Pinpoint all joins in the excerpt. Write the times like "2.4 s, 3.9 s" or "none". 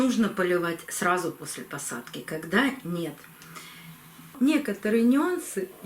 4.3 s

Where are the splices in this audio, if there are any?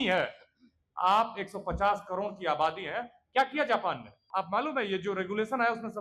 4.3 s

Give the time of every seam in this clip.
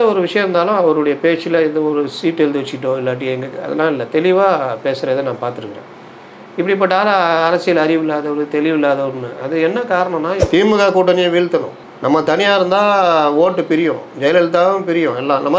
10.4 s

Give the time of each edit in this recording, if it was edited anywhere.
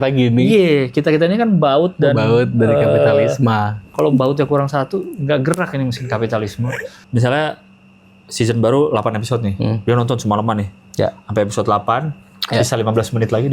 3.8 s, 6.9 s

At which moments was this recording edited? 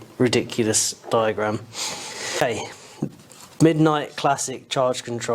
2.4 s

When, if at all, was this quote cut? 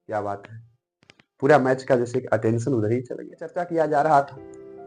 3.6 s

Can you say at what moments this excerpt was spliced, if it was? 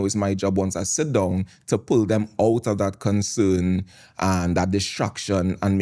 none

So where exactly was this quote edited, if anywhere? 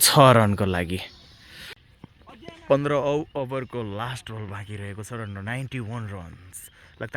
1.7 s

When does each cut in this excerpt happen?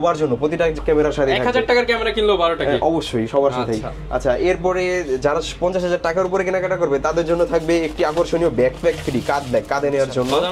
none

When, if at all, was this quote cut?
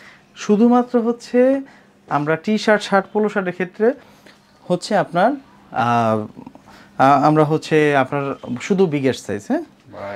none

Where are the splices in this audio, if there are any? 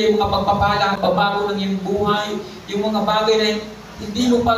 1.0 s

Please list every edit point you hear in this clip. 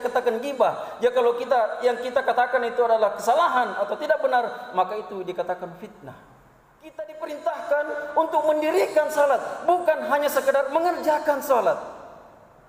7.1 s

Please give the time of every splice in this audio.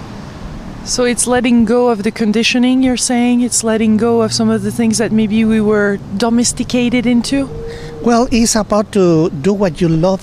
2.4 s

